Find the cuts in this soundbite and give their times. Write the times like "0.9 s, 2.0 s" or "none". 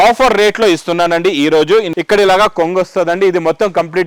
1.9 s